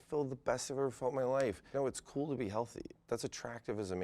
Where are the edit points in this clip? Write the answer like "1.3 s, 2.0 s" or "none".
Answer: 1.7 s, 2.9 s